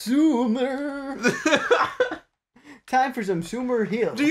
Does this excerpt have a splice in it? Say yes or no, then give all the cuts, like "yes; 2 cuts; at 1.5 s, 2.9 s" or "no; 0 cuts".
no; 0 cuts